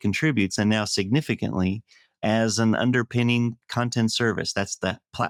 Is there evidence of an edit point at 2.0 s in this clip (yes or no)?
no